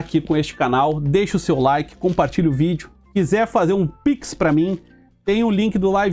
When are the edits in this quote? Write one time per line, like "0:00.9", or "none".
none